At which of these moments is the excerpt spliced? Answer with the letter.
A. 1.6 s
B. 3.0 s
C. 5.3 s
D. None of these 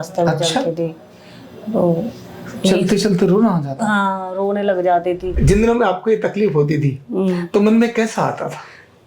C